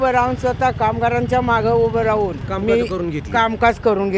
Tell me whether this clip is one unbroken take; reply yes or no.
no